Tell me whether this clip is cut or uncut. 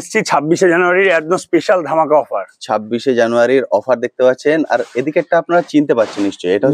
uncut